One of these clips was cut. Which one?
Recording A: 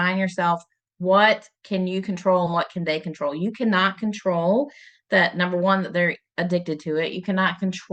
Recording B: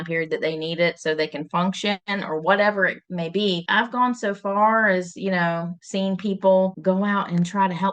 B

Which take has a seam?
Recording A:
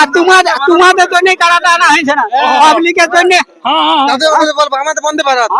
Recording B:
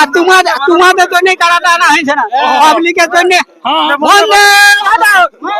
B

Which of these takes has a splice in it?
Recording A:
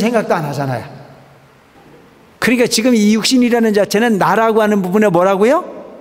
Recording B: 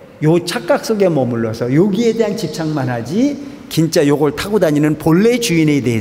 A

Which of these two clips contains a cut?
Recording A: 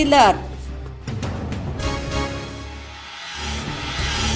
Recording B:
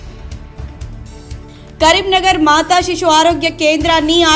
B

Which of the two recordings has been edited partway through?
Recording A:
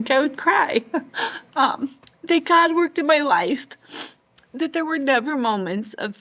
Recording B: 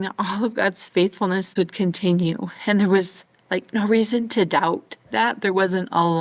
B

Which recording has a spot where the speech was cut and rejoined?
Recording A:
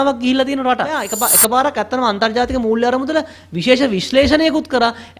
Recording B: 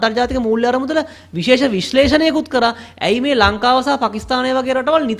A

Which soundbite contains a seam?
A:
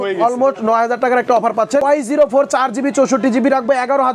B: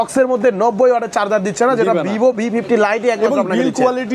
A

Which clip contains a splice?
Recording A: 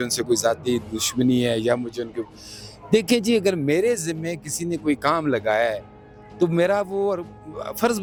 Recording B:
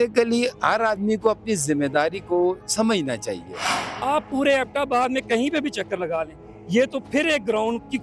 B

